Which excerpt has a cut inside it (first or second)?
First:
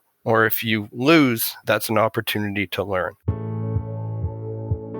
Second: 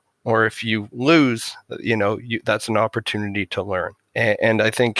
first